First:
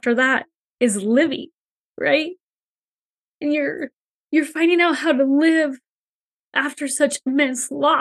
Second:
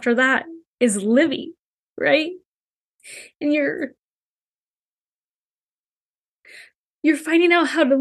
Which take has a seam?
first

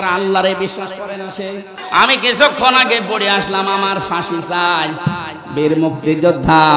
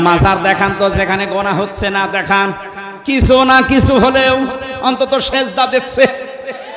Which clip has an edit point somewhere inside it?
first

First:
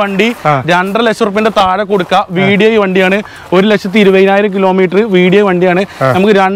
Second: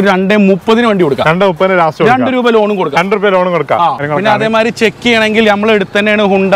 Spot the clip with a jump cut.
second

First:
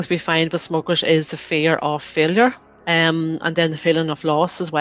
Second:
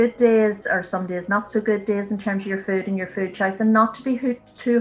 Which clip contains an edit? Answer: first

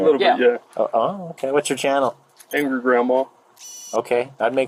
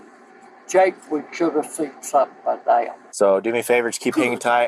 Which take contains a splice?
second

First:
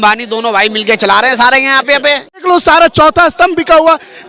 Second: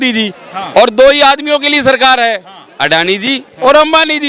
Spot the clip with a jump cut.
first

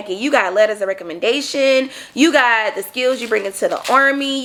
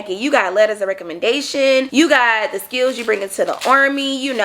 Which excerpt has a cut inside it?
second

